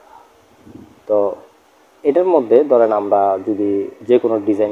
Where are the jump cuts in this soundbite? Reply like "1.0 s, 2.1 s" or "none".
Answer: none